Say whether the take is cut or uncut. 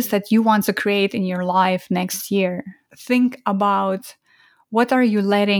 cut